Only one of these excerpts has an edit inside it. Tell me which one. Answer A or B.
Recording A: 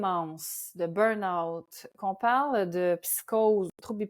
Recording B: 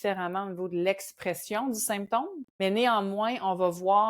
B